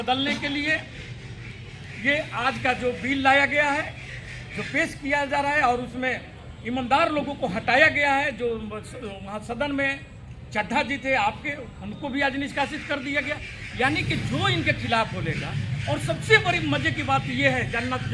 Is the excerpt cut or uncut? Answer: uncut